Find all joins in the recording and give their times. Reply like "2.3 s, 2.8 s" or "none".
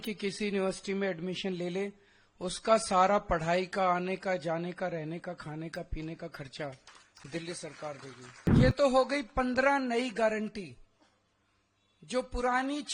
8.3 s